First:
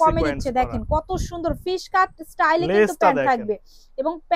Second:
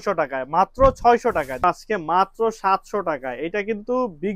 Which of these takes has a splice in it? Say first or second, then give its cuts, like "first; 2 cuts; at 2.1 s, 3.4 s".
second; 1 cut; at 1.6 s